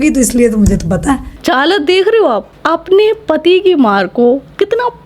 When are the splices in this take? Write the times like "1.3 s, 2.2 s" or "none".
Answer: none